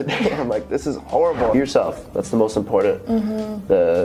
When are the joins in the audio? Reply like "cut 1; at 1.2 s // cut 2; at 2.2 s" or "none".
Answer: cut 1; at 1.5 s